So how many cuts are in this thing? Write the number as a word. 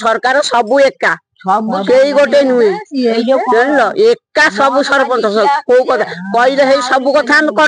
zero